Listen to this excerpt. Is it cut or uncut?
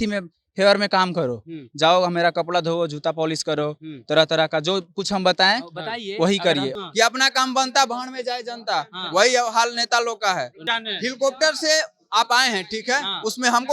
cut